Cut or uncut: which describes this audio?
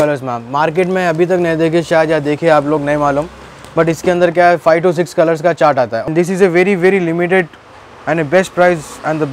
cut